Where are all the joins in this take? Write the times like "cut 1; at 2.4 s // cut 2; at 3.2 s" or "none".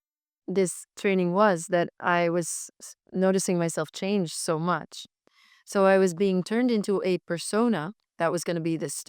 cut 1; at 8.0 s